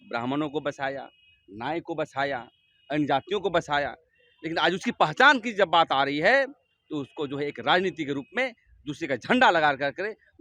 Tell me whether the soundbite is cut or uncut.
uncut